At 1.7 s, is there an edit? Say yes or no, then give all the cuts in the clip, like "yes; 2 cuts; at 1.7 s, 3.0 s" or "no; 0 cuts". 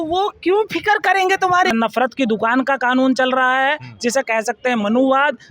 yes; 1 cut; at 1.7 s